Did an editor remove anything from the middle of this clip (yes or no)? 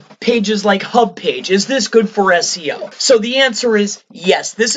yes